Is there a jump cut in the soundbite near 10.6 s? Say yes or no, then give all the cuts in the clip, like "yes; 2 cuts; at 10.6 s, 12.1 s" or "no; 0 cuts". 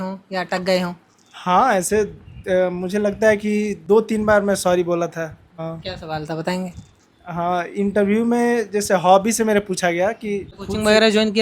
yes; 3 cuts; at 3.8 s, 5.4 s, 10.6 s